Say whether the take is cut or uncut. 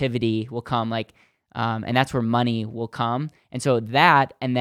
uncut